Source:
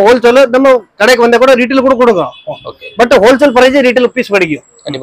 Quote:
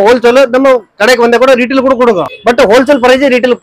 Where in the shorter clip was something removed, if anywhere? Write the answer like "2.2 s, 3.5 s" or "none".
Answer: 2.3 s